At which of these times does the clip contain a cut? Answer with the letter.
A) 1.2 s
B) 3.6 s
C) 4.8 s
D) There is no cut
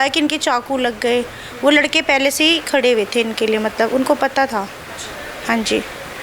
D